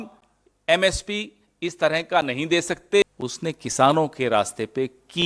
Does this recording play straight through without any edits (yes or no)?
no